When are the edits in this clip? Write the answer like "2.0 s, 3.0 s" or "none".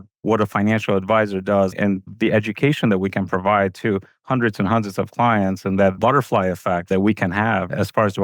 6.9 s